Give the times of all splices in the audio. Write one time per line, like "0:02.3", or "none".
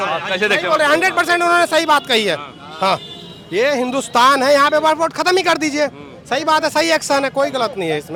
none